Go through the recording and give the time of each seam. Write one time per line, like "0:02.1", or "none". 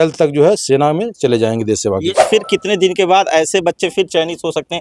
0:02.2